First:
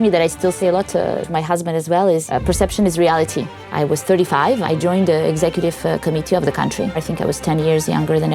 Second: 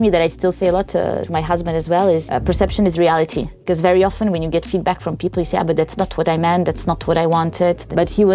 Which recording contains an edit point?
first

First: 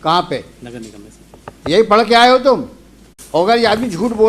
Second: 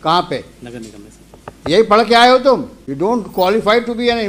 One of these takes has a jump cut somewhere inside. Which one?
first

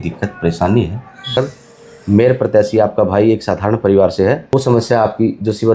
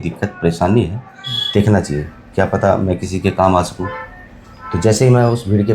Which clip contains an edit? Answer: first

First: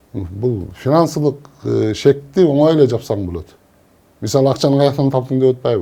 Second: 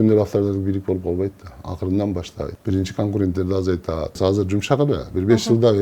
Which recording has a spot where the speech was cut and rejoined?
second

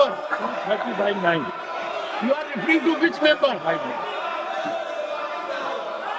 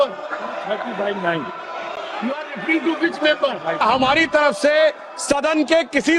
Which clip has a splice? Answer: second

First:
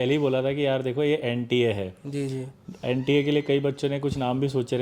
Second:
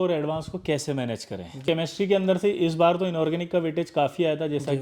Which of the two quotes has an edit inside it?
second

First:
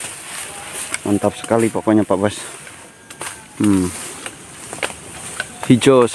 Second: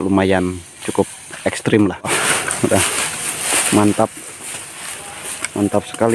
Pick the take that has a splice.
second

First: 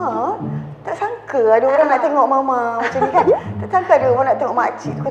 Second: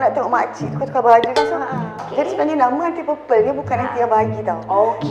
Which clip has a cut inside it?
second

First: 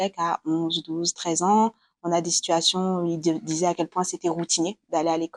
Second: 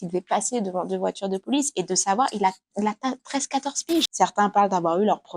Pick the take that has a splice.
second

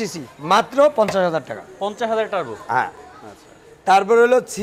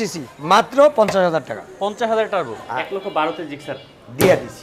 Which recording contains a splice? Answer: second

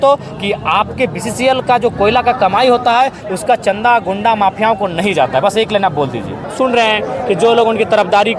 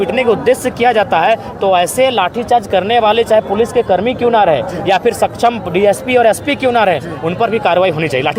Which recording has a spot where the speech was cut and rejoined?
first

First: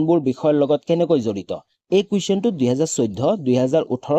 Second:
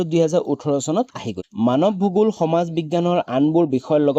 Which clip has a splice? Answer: second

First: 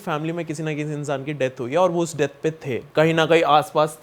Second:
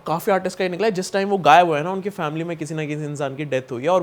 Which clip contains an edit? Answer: first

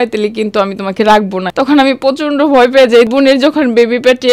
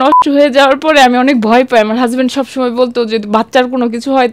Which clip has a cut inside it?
first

